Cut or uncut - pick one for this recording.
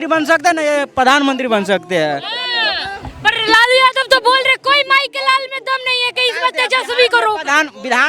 uncut